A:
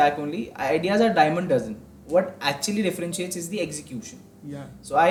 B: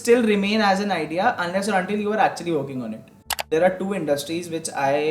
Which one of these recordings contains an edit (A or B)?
B